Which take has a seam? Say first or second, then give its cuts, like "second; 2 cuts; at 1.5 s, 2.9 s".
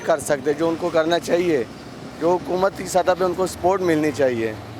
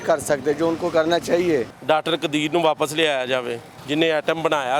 second; 2 cuts; at 1.7 s, 3.7 s